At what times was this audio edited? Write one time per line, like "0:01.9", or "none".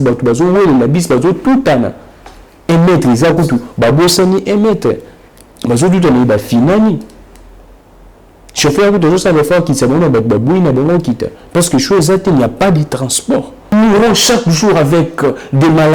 0:13.7